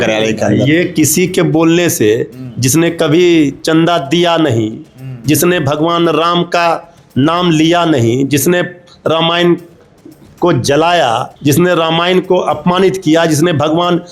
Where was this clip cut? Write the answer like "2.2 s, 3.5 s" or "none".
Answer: 11.3 s